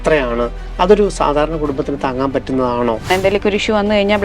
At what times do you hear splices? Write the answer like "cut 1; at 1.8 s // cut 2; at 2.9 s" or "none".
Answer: cut 1; at 3.1 s